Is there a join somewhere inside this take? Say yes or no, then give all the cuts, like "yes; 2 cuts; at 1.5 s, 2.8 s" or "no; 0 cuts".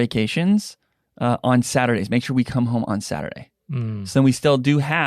no; 0 cuts